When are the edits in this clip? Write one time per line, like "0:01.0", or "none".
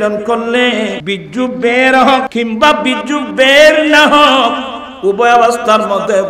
0:01.0
0:02.3